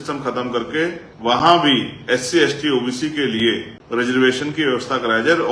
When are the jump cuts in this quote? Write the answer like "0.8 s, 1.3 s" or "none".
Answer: 1.1 s, 3.7 s